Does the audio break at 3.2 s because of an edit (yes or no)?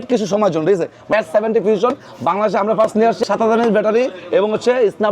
yes